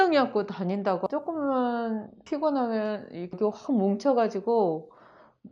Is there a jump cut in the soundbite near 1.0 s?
yes; 1 cut; at 1.0 s

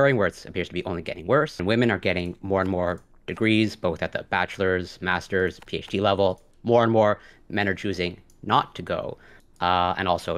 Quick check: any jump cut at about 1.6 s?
yes; 2 cuts; at 1.6 s, 6.5 s

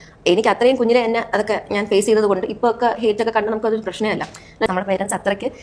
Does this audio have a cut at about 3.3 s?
no; 1 cut; at 4.7 s

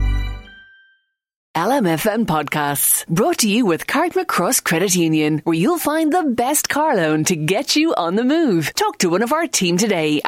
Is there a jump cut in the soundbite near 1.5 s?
yes; 1 cut; at 1.5 s

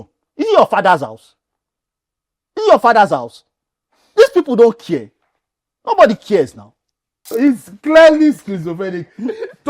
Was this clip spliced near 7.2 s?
yes; 1 cut; at 7.2 s

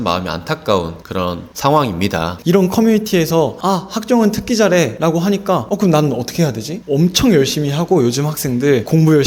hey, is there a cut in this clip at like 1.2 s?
yes; 4 cuts; at 1.2 s, 2.4 s, 5.2 s, 6.7 s

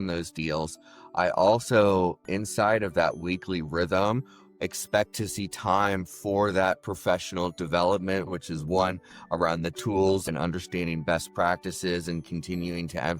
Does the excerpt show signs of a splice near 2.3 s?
no; 2 cuts; at 8.3 s, 10.3 s

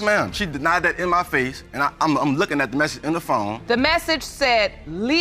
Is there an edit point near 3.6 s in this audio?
yes; 1 cut; at 3.6 s

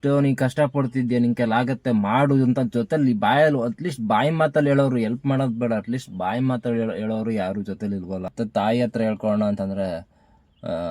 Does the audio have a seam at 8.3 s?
yes; 1 cut; at 8.3 s

